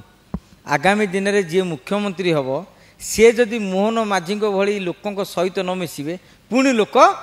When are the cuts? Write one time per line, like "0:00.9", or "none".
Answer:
none